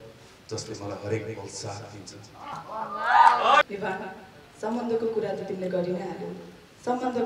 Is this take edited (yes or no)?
yes